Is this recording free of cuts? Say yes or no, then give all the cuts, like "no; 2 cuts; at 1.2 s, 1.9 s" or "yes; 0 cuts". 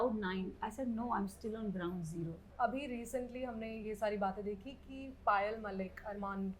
no; 1 cut; at 2.5 s